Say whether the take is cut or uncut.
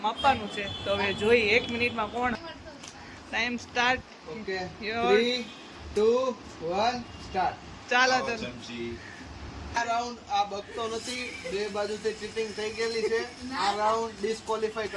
cut